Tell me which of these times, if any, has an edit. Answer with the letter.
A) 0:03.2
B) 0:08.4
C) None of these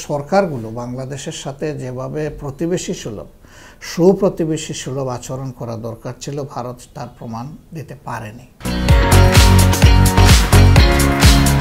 C